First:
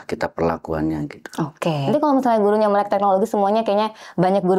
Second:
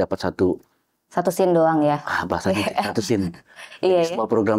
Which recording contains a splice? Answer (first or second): first